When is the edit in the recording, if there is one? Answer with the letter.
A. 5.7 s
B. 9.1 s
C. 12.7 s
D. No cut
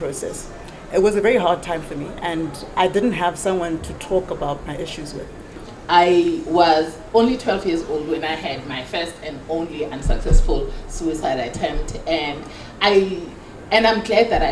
A